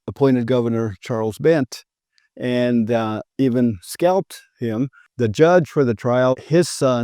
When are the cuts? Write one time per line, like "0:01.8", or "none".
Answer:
0:05.0
0:06.3